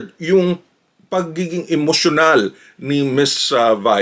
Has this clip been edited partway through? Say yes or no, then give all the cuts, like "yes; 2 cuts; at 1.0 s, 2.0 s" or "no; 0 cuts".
no; 0 cuts